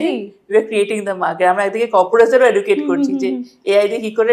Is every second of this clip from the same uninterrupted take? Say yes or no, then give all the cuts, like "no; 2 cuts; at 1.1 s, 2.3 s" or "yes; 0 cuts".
yes; 0 cuts